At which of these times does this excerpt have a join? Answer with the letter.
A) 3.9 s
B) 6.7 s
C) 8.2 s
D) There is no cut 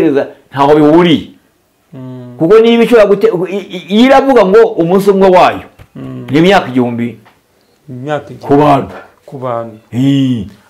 D